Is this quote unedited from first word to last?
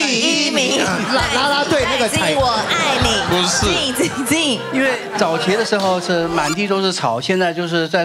yes; 0 cuts

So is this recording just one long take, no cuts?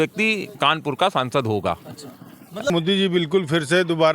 no; 1 cut; at 2.7 s

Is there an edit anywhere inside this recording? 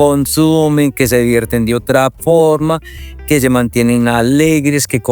no; 0 cuts

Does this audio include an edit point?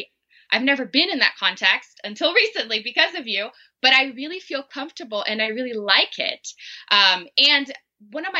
no; 0 cuts

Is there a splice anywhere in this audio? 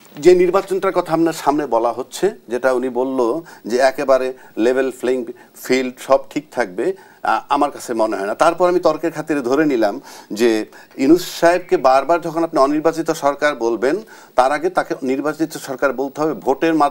no; 0 cuts

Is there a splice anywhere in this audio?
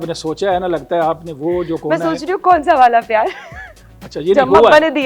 no; 0 cuts

